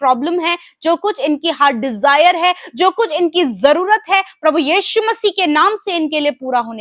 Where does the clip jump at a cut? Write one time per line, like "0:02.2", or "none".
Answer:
none